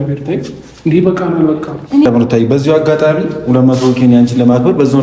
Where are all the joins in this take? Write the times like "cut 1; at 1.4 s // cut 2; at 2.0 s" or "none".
cut 1; at 2.0 s